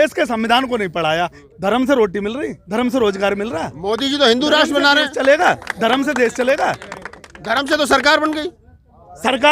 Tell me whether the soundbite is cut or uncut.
cut